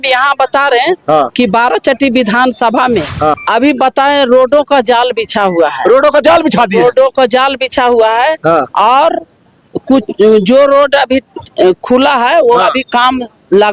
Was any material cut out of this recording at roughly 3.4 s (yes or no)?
yes